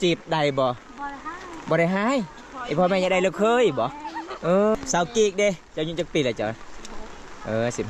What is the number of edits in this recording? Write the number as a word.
one